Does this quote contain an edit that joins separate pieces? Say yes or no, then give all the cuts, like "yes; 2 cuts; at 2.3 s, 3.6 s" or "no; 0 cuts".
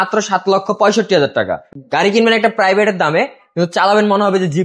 yes; 1 cut; at 1.7 s